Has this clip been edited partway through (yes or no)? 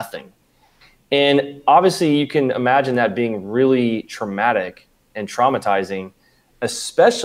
no